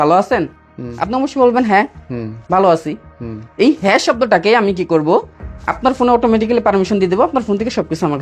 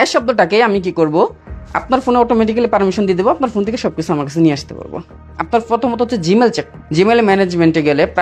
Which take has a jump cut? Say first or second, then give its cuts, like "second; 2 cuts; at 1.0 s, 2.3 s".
second; 2 cuts; at 5.4 s, 6.8 s